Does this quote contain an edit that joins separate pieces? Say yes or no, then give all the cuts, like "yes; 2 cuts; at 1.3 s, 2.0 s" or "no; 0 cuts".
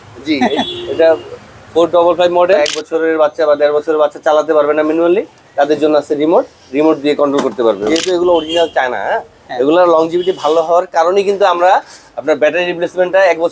yes; 2 cuts; at 2.6 s, 7.9 s